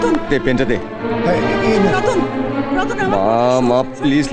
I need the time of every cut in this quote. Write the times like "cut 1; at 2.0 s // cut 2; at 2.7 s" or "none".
none